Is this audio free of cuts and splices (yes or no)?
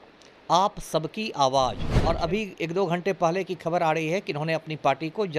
no